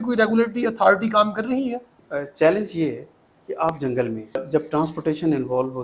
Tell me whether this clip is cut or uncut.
cut